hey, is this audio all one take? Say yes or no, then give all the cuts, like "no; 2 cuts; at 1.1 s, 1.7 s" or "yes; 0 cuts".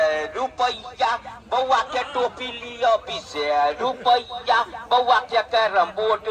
yes; 0 cuts